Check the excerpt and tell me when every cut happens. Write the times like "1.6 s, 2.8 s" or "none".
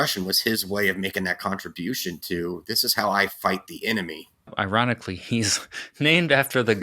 4.5 s